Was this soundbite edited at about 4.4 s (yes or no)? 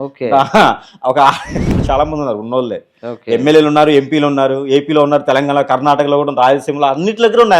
no